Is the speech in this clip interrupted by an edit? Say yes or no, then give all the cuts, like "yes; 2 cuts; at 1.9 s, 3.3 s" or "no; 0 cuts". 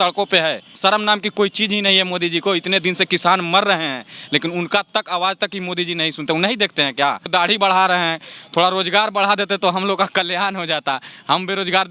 yes; 2 cuts; at 0.8 s, 7.2 s